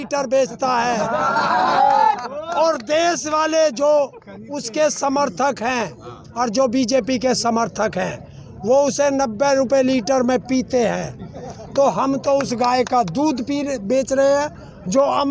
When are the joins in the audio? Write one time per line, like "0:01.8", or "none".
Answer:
none